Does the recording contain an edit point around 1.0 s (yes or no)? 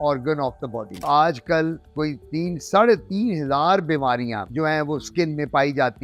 yes